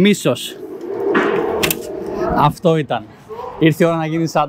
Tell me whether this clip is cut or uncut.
uncut